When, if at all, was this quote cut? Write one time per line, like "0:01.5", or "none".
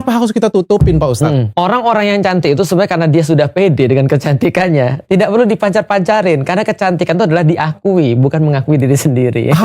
0:01.5